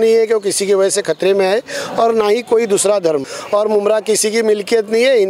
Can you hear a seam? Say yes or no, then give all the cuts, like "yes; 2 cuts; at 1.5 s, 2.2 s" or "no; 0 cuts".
yes; 1 cut; at 3.3 s